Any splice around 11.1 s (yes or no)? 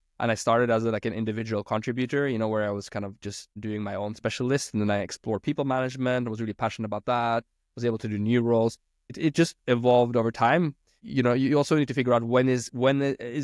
yes